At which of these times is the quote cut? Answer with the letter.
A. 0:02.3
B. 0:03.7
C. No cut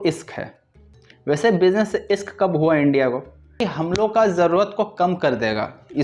B